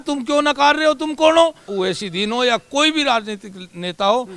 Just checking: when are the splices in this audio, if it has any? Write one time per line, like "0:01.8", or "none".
0:01.6